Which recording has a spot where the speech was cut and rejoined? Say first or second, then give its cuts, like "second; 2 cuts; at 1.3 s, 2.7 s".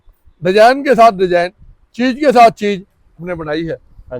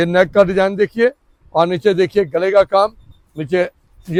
first; 1 cut; at 3.3 s